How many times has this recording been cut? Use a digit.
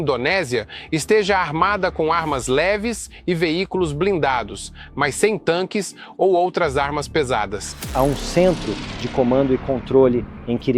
1